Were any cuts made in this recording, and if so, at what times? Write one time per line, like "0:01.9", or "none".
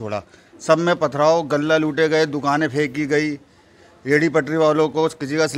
none